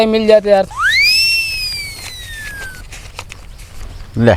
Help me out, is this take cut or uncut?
uncut